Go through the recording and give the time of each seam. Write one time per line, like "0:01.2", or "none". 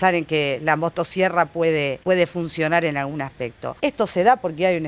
0:02.0
0:03.6